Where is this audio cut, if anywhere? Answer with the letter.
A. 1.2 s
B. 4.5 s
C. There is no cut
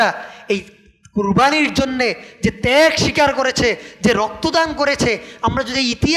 C